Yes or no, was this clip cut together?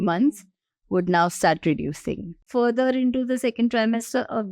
yes